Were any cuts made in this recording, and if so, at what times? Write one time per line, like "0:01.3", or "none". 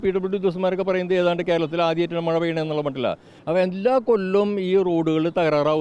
0:03.3